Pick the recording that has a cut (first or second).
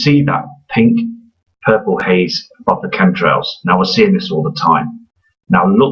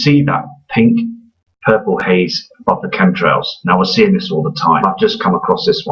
first